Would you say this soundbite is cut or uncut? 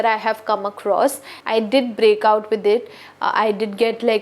cut